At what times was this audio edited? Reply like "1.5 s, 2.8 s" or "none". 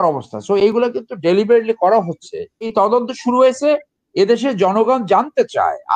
2.7 s